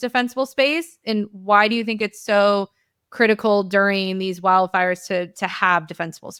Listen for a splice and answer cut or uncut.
uncut